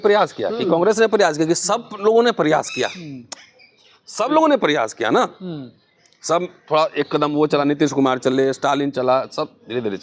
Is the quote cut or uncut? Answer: uncut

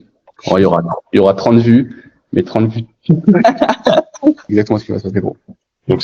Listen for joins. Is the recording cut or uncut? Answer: cut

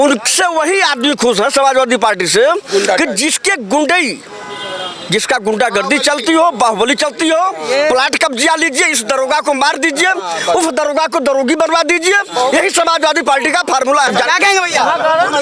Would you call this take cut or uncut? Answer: uncut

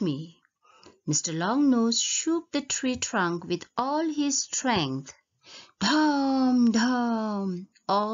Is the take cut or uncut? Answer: uncut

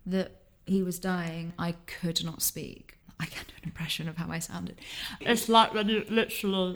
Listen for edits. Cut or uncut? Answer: cut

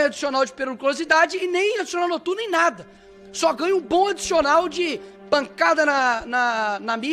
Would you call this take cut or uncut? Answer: uncut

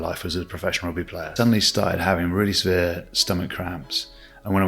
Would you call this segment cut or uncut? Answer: cut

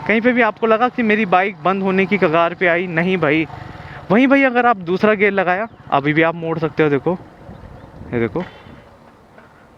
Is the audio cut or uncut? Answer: uncut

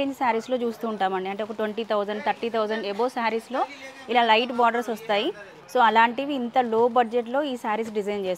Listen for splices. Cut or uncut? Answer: uncut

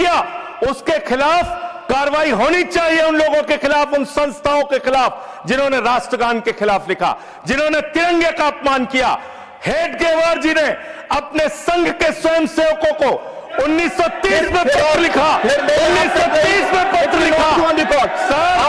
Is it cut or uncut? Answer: uncut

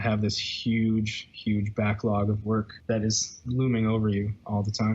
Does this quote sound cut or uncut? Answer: cut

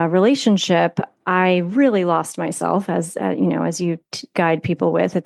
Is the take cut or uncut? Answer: uncut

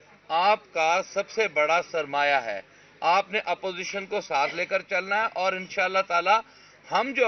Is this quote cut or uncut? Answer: uncut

